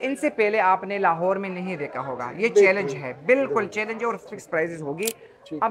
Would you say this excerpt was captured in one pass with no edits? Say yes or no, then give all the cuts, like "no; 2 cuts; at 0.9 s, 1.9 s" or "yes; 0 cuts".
yes; 0 cuts